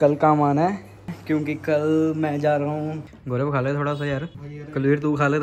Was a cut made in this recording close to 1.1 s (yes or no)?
yes